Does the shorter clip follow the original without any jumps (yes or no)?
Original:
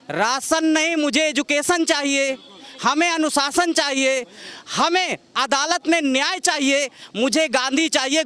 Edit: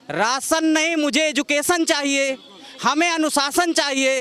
yes